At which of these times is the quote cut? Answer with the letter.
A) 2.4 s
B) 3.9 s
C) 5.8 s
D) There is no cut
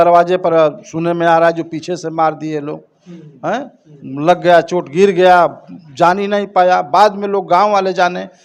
D